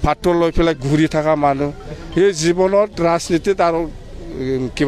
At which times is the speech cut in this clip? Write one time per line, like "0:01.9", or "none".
none